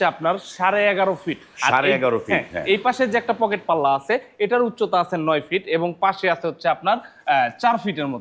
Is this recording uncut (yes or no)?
yes